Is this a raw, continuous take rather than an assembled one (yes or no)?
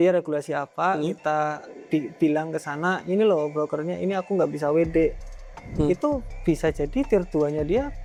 yes